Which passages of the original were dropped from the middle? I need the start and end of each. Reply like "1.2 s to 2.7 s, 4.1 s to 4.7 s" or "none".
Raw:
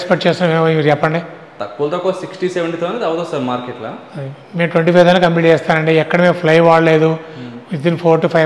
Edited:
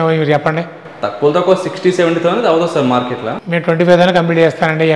3.9 s to 4.4 s